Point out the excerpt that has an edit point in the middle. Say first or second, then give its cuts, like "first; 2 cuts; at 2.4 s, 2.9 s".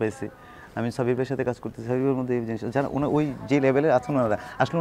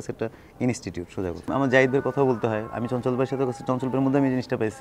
second; 1 cut; at 1.5 s